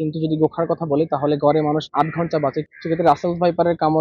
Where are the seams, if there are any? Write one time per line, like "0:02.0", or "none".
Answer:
0:02.3